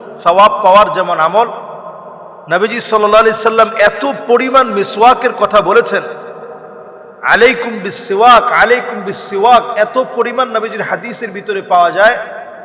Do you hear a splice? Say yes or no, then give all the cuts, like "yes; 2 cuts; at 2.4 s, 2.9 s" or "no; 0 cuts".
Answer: no; 0 cuts